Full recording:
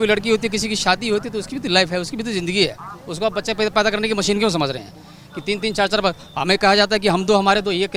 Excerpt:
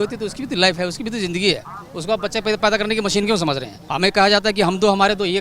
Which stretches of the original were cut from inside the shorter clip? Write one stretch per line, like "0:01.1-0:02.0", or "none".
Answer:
0:04.9-0:06.3